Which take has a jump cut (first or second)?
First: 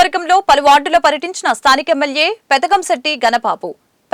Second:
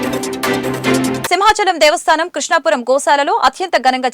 second